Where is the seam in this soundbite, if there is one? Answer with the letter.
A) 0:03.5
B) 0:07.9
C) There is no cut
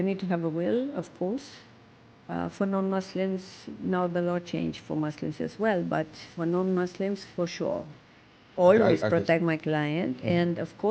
B